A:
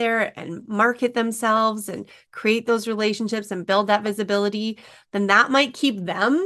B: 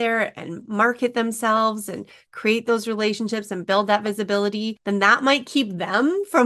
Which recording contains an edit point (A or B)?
B